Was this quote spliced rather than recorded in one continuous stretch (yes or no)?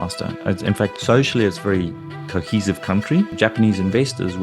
yes